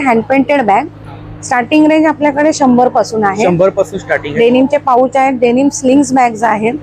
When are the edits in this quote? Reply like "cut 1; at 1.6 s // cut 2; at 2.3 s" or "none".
none